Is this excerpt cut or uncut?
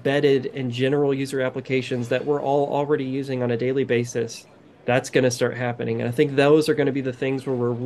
uncut